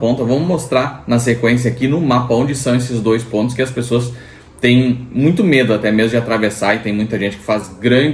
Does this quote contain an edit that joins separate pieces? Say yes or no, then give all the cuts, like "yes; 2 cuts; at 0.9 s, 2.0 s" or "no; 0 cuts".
no; 0 cuts